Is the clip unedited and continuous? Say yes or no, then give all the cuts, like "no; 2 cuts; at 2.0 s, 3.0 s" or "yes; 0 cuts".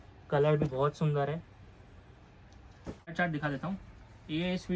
no; 1 cut; at 3.1 s